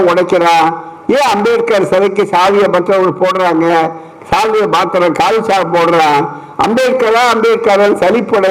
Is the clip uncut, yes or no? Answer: yes